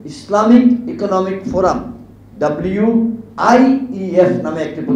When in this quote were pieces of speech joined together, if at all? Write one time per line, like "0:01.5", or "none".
none